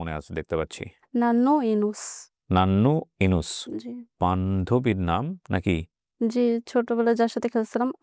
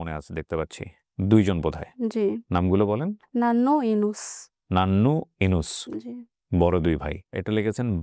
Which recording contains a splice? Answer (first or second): first